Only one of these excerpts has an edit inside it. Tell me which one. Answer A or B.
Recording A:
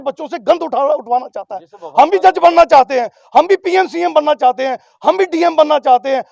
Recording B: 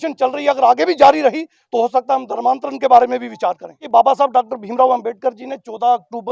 B